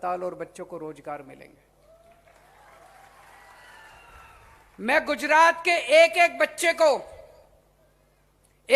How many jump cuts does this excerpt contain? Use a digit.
1